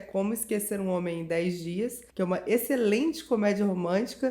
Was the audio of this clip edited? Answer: yes; 1 cut; at 2.0 s

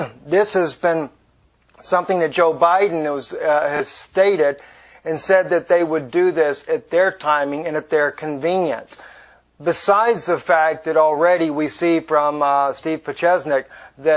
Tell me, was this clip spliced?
yes; 1 cut; at 6.0 s

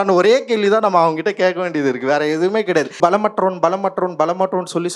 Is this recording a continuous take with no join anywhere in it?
no; 1 cut; at 3.0 s

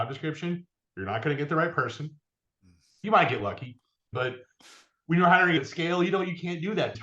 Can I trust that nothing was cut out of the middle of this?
no; 3 cuts; at 3.0 s, 4.1 s, 5.6 s

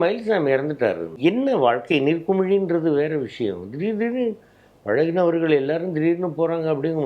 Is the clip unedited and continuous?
no; 1 cut; at 1.1 s

